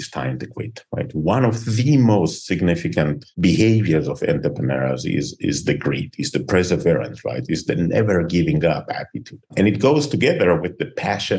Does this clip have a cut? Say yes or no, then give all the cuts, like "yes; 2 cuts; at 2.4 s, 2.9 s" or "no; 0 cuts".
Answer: no; 0 cuts